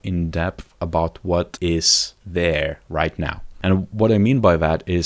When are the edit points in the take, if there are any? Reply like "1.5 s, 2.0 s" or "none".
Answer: 1.7 s